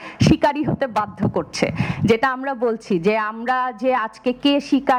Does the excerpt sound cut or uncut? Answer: uncut